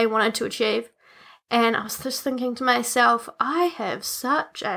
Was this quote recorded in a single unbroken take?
yes; 0 cuts

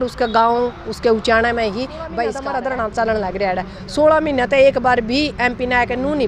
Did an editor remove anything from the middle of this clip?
yes; 1 cut; at 2.3 s

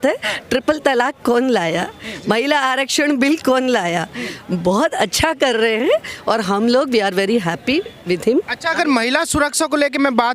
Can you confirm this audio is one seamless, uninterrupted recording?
yes; 0 cuts

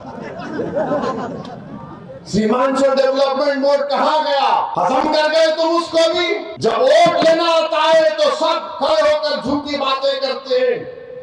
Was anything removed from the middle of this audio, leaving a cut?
yes; 2 cuts; at 4.7 s, 6.5 s

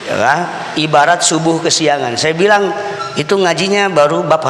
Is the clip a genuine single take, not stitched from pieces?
yes; 0 cuts

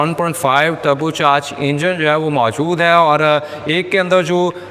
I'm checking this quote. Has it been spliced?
no; 0 cuts

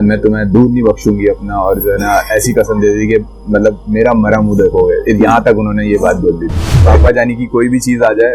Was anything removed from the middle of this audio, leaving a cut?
yes; 1 cut; at 6.8 s

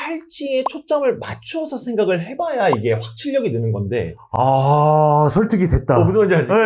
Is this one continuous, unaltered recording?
yes; 0 cuts

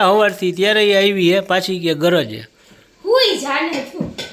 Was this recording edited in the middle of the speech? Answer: no; 0 cuts

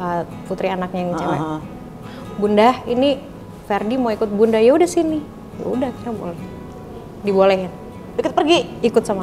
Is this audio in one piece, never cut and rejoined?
yes; 0 cuts

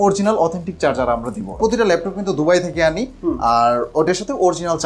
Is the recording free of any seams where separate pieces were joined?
no; 1 cut; at 1.6 s

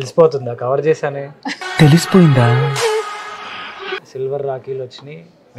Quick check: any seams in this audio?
yes; 1 cut; at 4.1 s

